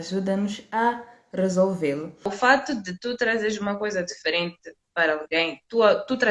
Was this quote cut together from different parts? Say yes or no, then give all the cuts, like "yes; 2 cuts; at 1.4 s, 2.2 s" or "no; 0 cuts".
yes; 1 cut; at 2.3 s